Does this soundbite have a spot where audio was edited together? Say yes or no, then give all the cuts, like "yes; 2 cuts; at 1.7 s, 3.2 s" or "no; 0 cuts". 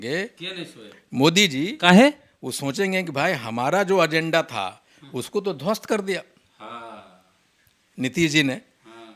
no; 0 cuts